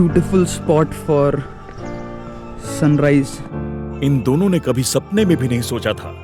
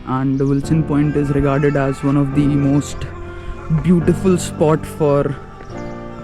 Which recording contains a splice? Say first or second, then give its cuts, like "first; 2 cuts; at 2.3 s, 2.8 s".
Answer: first; 1 cut; at 3.9 s